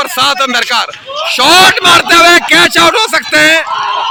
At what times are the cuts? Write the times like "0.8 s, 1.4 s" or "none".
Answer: none